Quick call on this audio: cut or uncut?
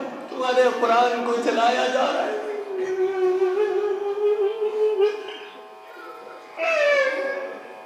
uncut